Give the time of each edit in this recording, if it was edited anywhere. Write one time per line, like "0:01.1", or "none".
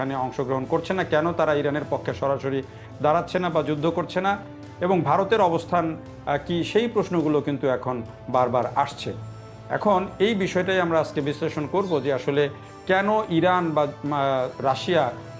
none